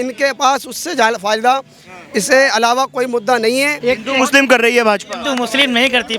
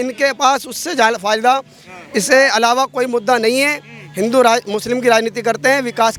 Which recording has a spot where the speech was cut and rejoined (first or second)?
first